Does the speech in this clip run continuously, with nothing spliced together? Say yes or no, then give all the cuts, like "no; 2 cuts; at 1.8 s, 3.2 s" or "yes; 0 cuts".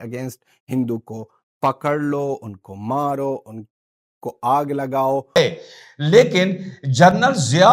no; 1 cut; at 5.4 s